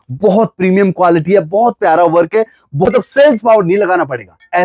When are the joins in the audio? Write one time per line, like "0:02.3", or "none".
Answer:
0:02.9